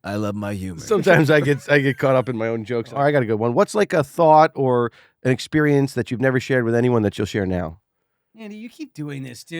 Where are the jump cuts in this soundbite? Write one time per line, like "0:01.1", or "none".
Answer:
0:02.9